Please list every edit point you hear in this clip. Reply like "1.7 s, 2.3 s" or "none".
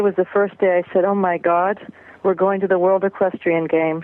none